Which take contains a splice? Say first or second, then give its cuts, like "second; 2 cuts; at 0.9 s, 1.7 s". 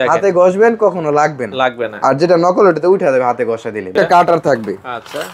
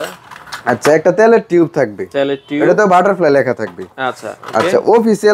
first; 1 cut; at 3.9 s